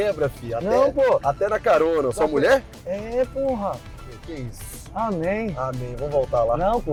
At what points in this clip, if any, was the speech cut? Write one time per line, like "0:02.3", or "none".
none